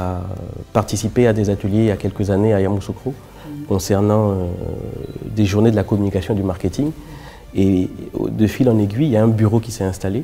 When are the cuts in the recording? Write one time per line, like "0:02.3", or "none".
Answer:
none